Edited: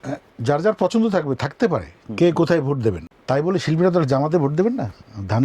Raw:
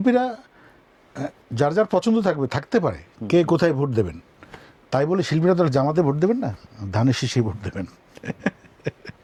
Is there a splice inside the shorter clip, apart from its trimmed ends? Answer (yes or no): yes